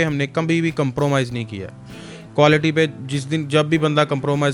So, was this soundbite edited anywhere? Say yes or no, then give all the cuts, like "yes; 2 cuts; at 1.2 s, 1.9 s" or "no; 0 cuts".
no; 0 cuts